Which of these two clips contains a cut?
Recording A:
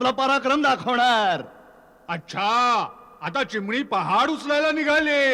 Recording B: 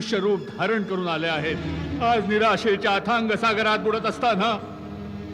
B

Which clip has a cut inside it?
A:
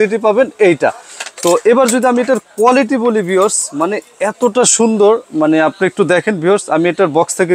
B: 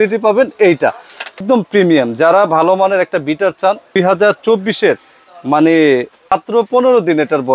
B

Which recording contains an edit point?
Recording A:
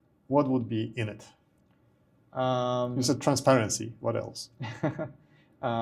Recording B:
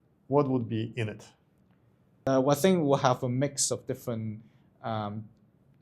B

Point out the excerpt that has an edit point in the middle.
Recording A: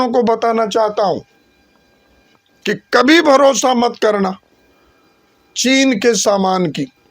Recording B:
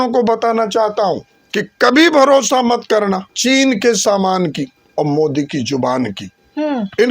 B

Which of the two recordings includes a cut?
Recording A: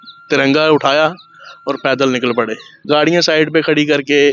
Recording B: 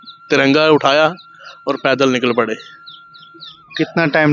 A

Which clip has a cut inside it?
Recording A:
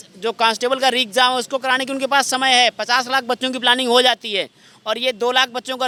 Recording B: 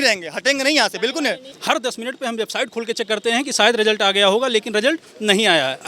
B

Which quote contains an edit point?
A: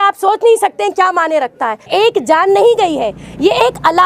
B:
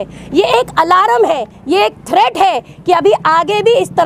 A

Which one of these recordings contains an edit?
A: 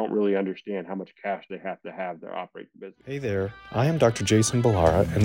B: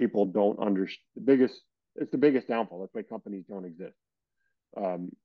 A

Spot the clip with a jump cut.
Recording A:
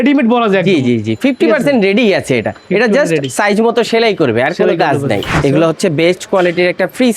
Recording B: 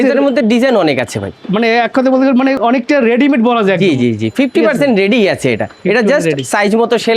A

